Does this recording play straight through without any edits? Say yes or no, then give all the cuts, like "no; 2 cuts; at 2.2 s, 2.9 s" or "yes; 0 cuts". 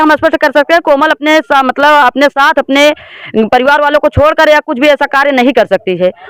yes; 0 cuts